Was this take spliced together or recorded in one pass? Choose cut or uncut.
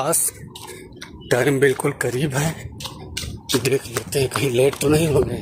uncut